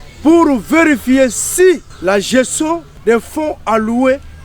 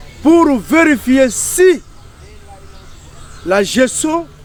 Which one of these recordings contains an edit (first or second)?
first